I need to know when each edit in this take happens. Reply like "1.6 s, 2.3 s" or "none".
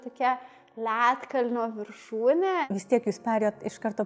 2.6 s